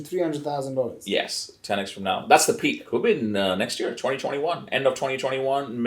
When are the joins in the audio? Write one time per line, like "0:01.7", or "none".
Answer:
0:02.8